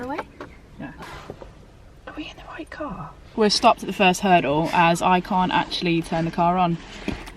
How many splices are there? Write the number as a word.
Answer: two